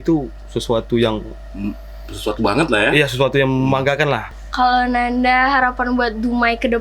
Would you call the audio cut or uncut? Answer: cut